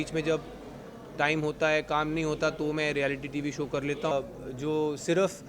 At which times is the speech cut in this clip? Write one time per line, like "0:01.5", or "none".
0:04.1